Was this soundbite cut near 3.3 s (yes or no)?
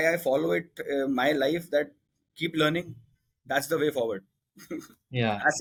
no